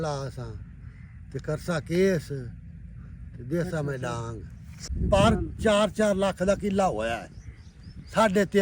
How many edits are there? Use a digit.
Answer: 1